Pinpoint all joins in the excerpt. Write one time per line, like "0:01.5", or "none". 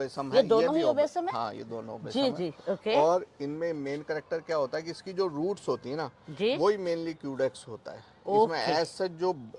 none